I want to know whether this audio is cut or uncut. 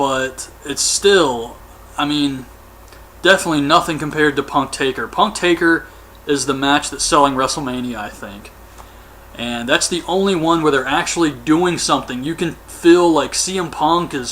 cut